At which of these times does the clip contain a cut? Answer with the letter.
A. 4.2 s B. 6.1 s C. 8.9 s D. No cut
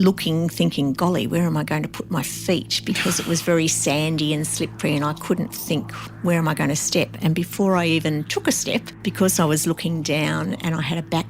C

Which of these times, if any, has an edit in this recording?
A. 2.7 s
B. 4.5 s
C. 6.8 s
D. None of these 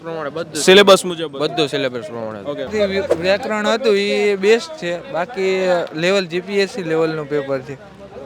A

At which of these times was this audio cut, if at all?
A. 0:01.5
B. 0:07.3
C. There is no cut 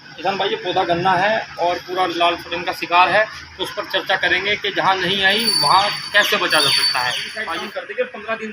B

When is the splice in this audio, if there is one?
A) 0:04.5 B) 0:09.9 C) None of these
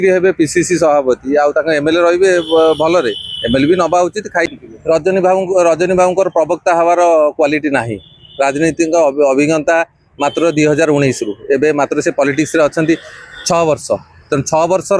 A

